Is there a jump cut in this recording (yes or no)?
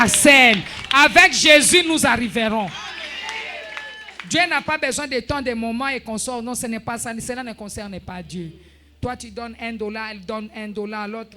no